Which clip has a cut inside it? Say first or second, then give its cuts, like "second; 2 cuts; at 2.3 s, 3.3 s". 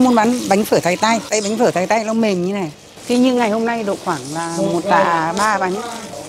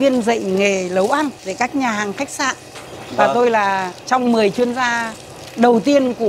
first; 2 cuts; at 1.3 s, 3.0 s